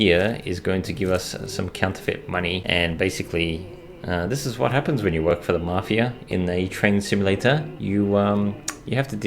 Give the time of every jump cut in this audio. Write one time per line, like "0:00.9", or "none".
0:02.6